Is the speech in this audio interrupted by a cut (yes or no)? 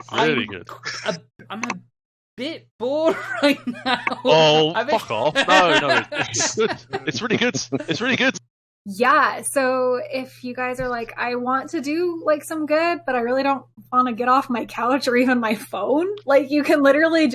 yes